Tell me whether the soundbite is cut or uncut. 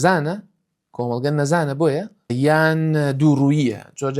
cut